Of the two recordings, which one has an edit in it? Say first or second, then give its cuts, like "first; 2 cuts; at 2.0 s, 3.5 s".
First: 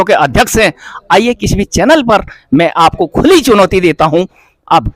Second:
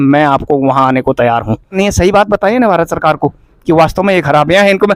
second; 1 cut; at 1.8 s